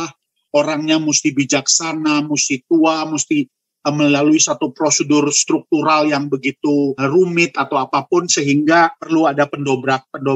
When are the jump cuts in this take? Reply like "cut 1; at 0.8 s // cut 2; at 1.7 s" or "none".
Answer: none